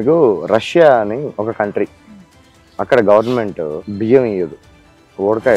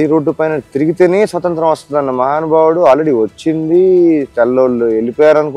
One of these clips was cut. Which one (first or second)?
first